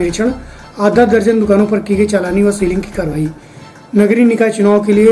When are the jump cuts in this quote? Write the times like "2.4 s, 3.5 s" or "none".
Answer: none

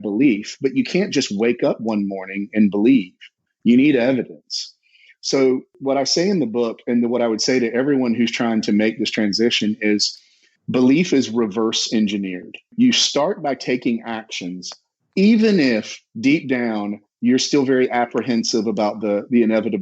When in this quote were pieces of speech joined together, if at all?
5.7 s, 12.7 s

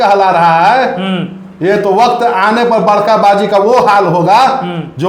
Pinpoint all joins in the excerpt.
none

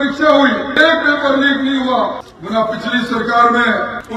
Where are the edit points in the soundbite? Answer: none

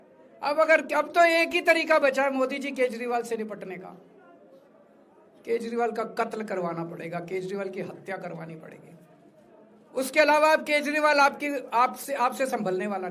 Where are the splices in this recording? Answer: none

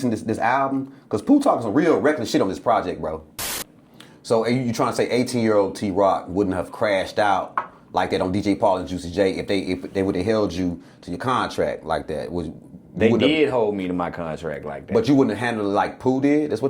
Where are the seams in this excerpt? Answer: 3.4 s

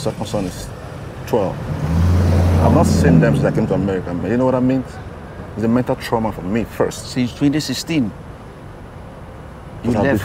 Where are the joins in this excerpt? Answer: none

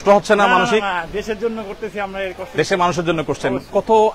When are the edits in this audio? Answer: none

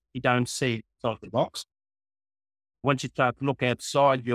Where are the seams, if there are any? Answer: 0.9 s, 2.8 s

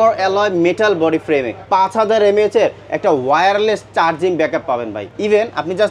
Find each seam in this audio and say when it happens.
1.6 s, 5.0 s

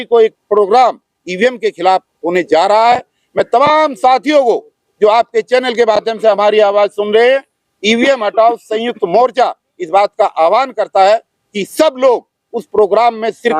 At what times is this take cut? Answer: none

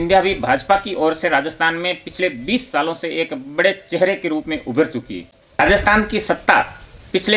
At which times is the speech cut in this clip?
none

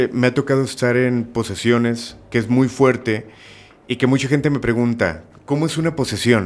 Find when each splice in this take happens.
5.3 s

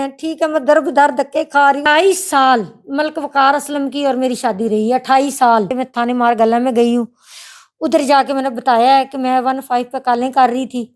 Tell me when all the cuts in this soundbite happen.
1.8 s, 5.8 s

